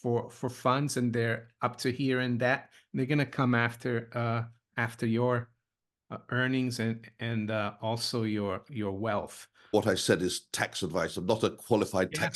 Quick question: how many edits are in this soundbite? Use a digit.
1